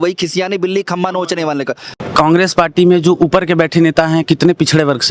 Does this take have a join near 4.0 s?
no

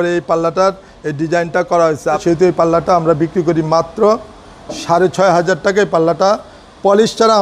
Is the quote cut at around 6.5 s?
no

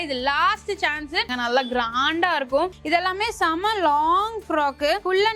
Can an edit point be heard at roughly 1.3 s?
yes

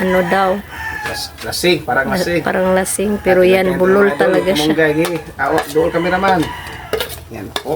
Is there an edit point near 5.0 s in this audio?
no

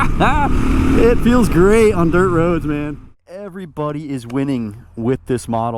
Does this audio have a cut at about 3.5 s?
yes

